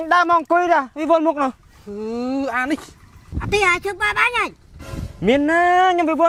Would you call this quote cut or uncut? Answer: uncut